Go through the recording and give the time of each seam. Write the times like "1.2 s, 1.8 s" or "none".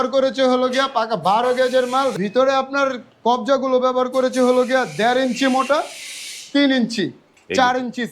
2.1 s